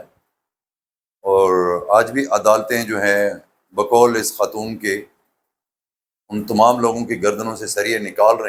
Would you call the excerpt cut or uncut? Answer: uncut